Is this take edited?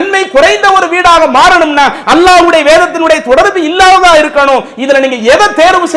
no; 0 cuts

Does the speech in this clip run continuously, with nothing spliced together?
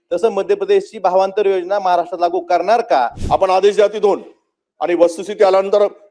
no; 1 cut; at 3.2 s

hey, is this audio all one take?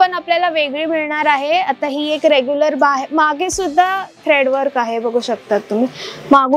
yes; 0 cuts

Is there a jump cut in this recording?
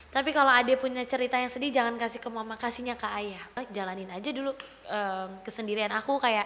yes; 1 cut; at 3.6 s

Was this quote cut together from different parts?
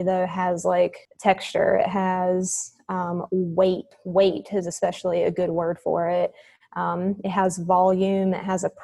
yes; 2 cuts; at 1.1 s, 3.9 s

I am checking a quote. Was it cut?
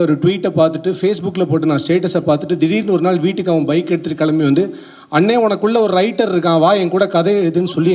no; 0 cuts

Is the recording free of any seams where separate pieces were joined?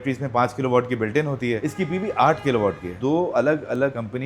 no; 2 cuts; at 1.6 s, 2.9 s

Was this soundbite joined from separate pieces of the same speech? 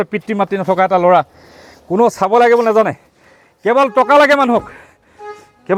no; 0 cuts

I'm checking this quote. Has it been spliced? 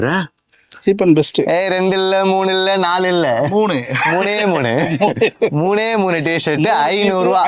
no; 0 cuts

